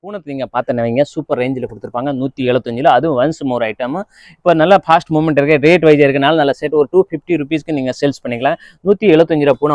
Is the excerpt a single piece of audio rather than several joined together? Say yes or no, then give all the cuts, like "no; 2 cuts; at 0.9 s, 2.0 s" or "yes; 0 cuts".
yes; 0 cuts